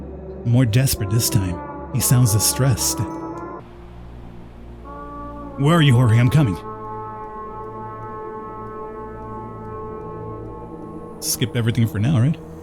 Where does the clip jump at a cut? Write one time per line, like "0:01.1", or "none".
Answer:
none